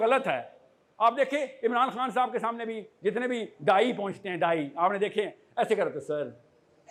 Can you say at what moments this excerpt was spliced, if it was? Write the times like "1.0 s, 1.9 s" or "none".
none